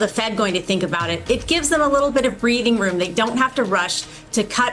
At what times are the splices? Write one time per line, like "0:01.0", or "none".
none